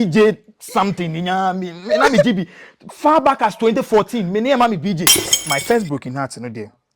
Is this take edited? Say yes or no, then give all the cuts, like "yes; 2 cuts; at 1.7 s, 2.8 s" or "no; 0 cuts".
yes; 1 cut; at 5.5 s